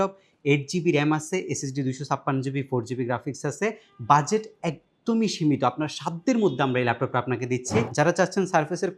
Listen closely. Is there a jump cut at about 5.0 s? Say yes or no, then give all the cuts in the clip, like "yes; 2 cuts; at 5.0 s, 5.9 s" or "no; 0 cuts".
no; 1 cut; at 7.9 s